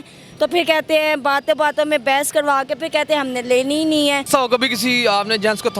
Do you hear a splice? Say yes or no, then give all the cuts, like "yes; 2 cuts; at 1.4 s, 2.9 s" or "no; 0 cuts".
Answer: yes; 1 cut; at 4.2 s